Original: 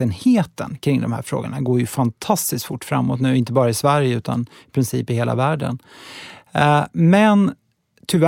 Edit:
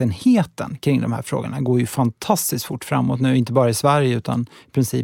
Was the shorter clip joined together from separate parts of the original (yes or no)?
no